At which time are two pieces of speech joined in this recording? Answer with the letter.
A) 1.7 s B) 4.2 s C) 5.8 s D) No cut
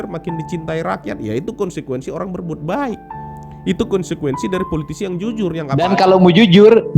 C